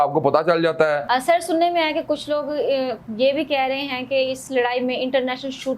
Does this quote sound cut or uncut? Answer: cut